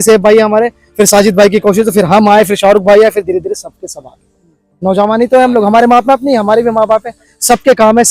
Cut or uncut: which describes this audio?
uncut